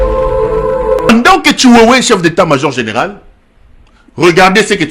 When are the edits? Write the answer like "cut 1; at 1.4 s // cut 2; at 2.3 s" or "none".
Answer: cut 1; at 1.1 s